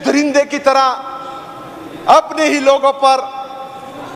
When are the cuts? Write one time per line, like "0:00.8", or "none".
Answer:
none